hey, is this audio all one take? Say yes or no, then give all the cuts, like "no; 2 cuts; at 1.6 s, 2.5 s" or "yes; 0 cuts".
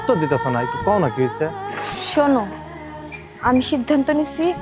no; 1 cut; at 1.5 s